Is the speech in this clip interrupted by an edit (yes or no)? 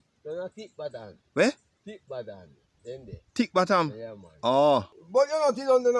yes